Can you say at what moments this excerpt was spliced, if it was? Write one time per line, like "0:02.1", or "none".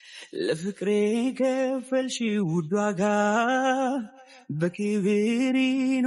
none